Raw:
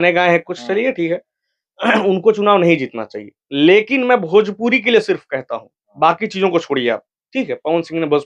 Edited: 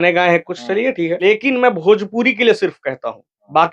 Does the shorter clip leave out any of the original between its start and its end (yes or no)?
yes